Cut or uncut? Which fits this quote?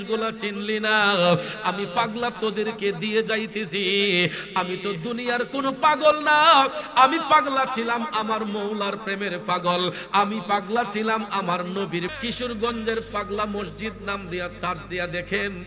cut